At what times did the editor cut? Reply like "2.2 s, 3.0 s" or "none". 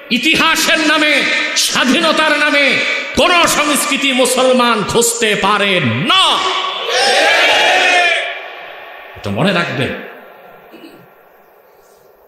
none